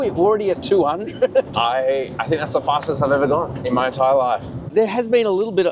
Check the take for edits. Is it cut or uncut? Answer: cut